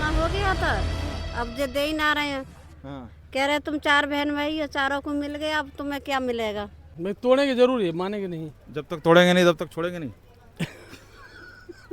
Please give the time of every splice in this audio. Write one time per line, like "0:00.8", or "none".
0:06.8